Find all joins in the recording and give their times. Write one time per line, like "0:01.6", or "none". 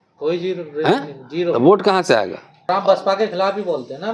0:02.5